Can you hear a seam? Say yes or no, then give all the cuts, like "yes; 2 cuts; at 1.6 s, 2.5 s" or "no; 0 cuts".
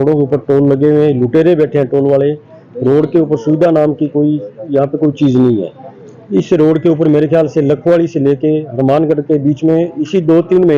no; 0 cuts